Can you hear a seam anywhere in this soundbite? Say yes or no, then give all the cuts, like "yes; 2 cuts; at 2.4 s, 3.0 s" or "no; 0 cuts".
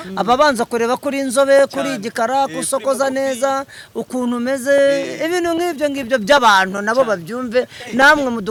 no; 0 cuts